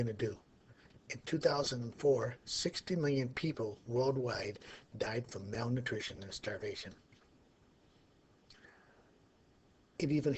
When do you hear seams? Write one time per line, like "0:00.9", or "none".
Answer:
0:03.0